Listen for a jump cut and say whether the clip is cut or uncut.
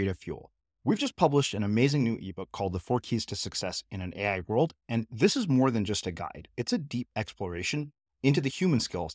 uncut